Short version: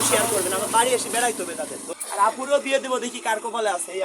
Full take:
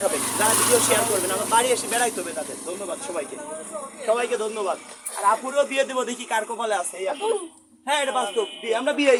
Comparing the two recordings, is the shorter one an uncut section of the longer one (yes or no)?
no